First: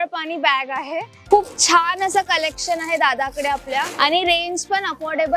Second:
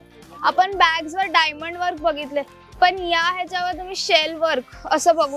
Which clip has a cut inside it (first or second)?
first